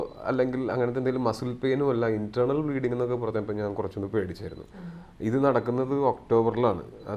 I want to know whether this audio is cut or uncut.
uncut